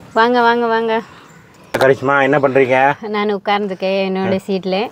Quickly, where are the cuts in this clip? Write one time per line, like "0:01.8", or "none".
0:01.8